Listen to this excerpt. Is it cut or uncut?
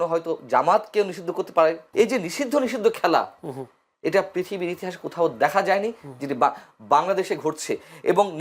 cut